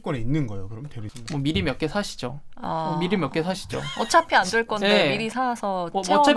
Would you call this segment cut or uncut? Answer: cut